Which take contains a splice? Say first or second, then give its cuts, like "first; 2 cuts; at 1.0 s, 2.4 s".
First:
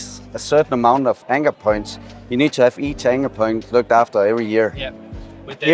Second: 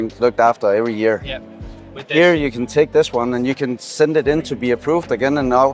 first; 1 cut; at 1.2 s